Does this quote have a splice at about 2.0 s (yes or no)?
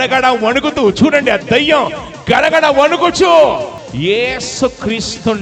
no